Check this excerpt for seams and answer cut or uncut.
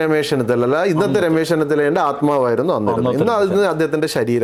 uncut